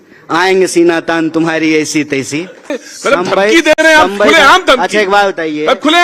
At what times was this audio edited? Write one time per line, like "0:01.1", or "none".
0:02.9